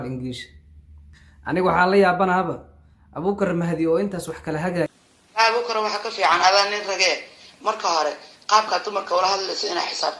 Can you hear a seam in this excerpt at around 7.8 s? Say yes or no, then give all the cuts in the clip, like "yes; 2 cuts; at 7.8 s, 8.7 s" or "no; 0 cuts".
no; 1 cut; at 4.9 s